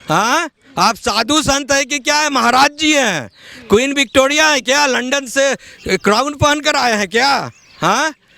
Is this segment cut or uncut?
uncut